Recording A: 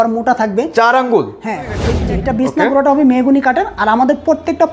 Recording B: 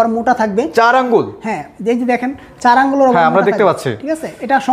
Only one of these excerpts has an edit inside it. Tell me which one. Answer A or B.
A